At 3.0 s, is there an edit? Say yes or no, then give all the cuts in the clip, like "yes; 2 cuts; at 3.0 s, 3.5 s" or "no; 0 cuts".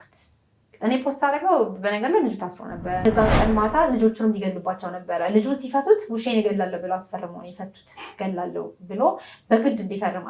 yes; 1 cut; at 3.0 s